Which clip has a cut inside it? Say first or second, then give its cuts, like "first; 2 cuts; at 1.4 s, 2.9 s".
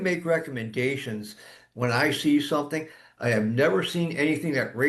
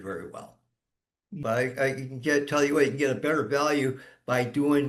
second; 1 cut; at 1.4 s